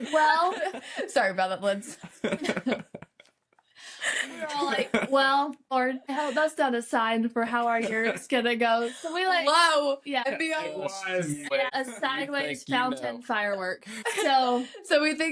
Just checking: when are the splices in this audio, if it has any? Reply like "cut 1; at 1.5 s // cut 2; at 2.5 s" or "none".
cut 1; at 5.7 s // cut 2; at 10.3 s // cut 3; at 11.5 s // cut 4; at 13.9 s